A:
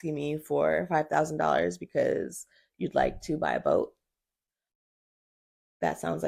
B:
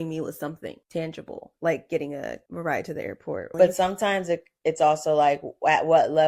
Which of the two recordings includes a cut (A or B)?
B